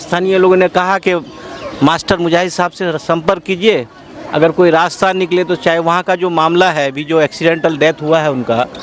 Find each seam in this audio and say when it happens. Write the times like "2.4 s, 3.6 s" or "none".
none